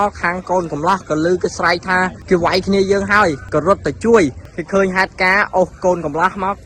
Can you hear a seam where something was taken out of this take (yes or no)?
yes